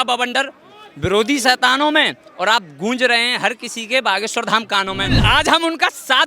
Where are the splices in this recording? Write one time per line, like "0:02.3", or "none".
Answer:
0:05.2